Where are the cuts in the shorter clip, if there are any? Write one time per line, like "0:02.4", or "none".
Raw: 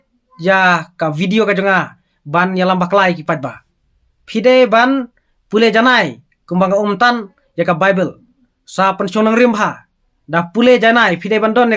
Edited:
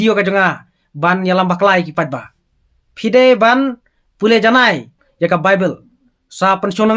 0:05.0